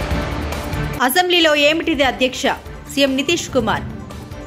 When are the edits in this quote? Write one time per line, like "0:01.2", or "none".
none